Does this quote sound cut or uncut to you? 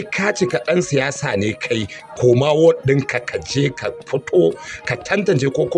uncut